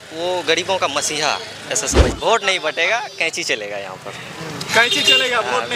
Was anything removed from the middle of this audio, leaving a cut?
yes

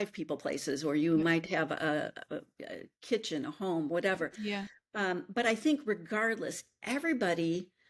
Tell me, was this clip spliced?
no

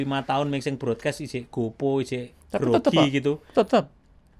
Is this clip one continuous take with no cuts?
yes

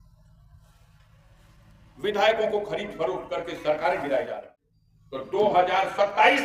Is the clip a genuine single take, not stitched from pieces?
no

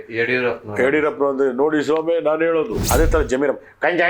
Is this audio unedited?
no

